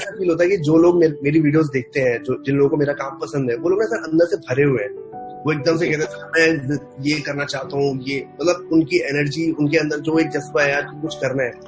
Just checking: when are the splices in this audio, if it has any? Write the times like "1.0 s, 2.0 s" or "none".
none